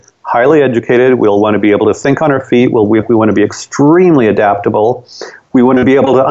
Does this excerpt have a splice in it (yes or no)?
no